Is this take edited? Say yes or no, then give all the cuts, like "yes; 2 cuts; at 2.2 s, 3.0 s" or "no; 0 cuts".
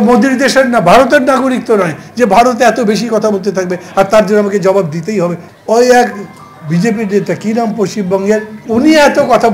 yes; 2 cuts; at 5.4 s, 8.6 s